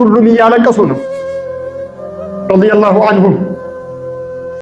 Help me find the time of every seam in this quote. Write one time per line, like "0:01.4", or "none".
0:01.0
0:02.5
0:03.5